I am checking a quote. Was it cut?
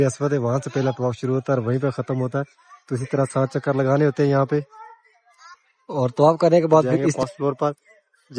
yes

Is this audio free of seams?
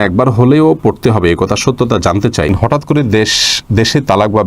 no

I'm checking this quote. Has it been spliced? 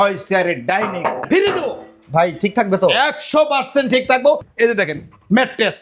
yes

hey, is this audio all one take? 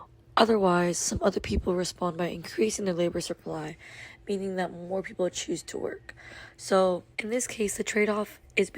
no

